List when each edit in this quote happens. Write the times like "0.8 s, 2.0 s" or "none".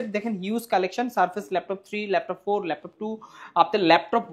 none